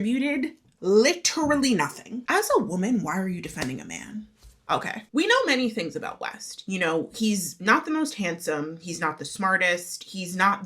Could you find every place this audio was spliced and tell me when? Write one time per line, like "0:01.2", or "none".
0:02.2
0:05.1